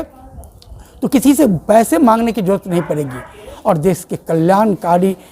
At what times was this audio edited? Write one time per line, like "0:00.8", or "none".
0:03.5